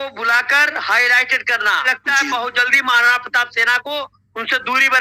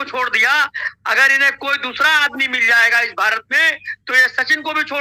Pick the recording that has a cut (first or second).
first